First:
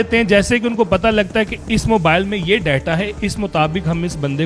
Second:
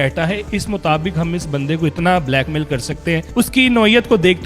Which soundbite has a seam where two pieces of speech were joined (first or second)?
second